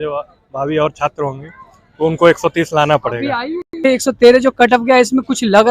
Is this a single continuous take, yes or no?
no